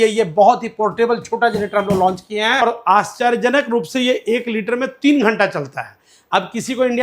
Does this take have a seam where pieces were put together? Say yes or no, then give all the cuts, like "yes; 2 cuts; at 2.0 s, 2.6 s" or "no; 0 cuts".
yes; 1 cut; at 2.6 s